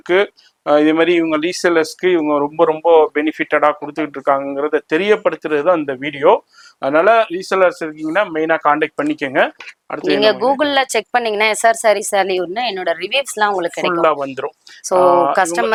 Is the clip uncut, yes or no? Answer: yes